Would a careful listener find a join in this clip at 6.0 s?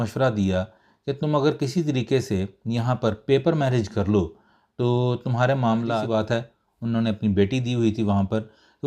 yes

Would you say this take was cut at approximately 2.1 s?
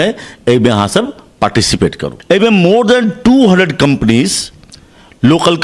yes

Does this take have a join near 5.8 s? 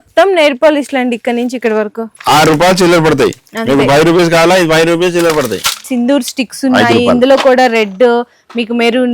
yes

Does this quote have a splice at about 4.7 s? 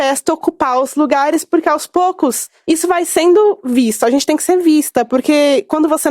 no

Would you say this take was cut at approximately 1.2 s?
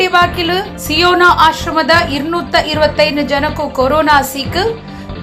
no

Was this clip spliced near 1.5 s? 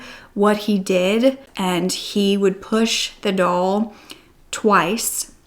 yes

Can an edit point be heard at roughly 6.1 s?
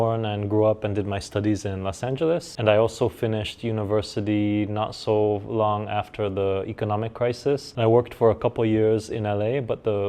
no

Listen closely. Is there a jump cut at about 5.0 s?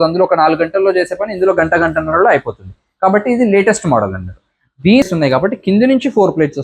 yes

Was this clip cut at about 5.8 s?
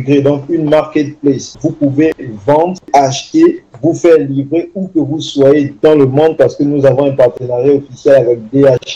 no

